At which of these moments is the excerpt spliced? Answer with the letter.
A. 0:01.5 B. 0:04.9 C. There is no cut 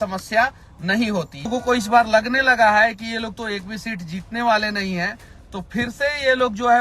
A